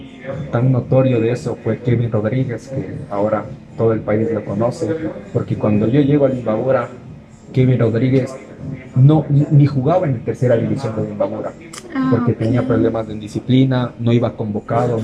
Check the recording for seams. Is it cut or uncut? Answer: uncut